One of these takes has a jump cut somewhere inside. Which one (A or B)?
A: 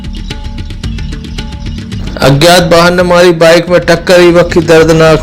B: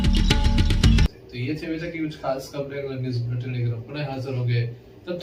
A